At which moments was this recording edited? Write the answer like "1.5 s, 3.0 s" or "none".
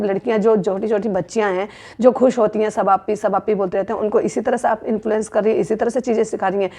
none